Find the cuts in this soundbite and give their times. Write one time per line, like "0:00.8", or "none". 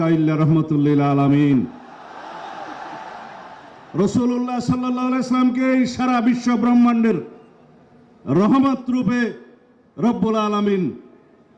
none